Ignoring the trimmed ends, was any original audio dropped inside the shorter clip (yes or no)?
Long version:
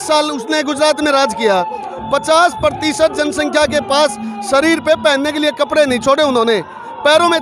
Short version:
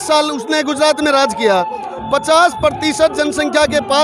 no